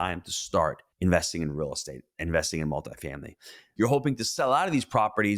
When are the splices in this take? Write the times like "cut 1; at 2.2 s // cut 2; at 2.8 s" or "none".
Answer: cut 1; at 3.6 s